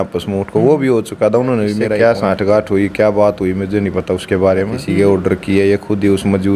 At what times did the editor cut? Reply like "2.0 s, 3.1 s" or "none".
1.9 s, 4.8 s